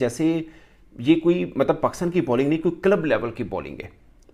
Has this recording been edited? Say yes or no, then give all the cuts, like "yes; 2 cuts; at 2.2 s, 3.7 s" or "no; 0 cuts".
no; 0 cuts